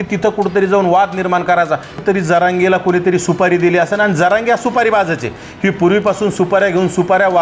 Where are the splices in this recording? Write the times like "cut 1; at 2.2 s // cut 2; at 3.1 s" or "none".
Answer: cut 1; at 1.9 s